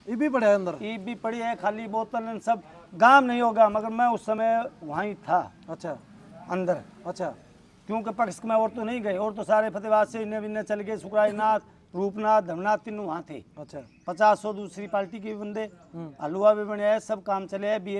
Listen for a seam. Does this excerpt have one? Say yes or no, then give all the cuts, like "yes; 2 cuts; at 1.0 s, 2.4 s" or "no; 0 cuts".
no; 0 cuts